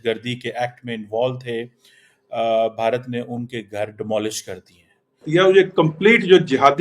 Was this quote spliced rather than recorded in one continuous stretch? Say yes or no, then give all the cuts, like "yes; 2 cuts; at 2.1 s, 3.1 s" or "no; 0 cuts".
yes; 1 cut; at 5.4 s